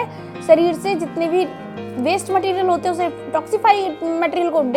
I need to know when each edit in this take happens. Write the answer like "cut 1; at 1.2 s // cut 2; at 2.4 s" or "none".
none